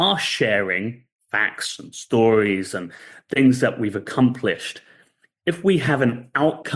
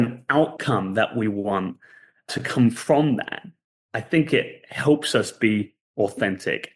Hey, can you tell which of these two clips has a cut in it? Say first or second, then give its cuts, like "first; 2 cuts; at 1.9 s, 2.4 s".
second; 1 cut; at 2.3 s